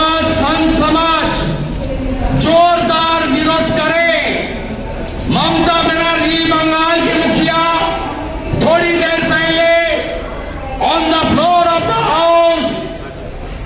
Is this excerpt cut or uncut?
uncut